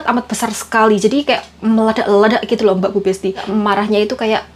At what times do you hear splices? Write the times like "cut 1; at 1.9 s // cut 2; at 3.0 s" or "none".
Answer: cut 1; at 3.4 s

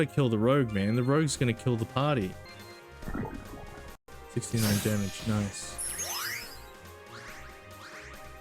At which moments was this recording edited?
cut 1; at 2.5 s // cut 2; at 4.0 s // cut 3; at 5.8 s

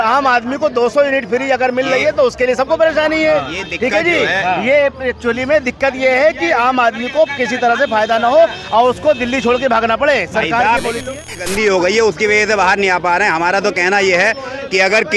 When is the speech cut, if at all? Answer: cut 1; at 11.1 s

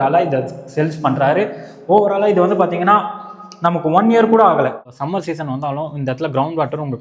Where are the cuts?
cut 1; at 5.0 s

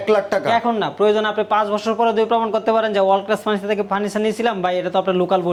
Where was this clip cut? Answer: none

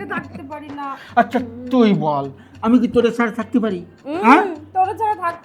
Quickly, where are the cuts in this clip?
none

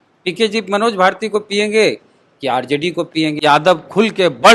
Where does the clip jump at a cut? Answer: cut 1; at 3.4 s

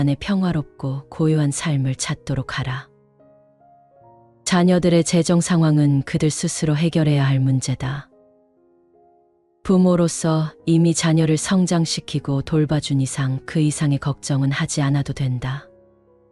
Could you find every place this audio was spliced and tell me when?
cut 1; at 8.1 s // cut 2; at 9.6 s

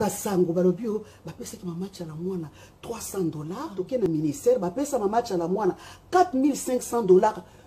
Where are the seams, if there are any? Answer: cut 1; at 4.1 s

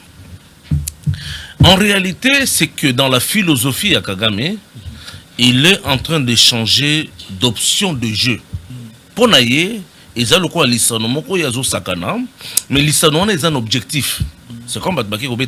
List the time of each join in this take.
none

